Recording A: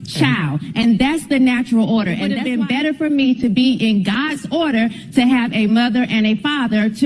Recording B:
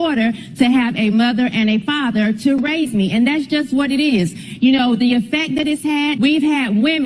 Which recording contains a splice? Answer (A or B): A